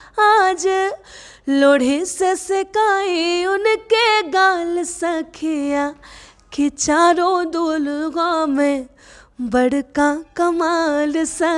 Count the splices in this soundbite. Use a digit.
0